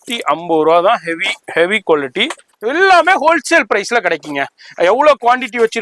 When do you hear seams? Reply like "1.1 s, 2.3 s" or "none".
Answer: 2.5 s